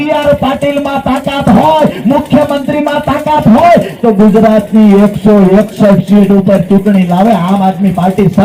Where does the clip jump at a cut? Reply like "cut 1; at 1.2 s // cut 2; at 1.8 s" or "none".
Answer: none